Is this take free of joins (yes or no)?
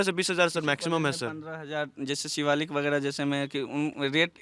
yes